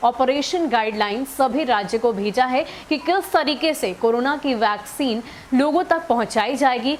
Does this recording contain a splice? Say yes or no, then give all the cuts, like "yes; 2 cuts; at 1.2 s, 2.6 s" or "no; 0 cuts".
no; 0 cuts